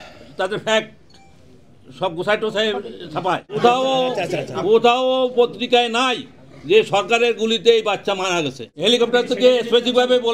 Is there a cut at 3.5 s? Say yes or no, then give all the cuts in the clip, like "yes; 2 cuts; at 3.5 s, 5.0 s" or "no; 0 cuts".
yes; 2 cuts; at 3.5 s, 8.7 s